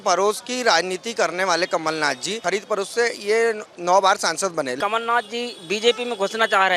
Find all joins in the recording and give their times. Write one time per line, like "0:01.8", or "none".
0:02.4
0:04.7